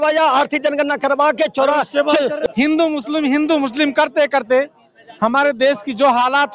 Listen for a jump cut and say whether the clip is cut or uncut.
cut